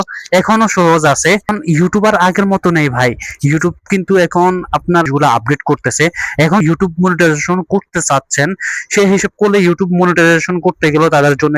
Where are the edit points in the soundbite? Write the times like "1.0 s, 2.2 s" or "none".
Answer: 1.6 s, 5.1 s, 6.6 s